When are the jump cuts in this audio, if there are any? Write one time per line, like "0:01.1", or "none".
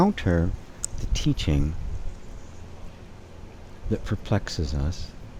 none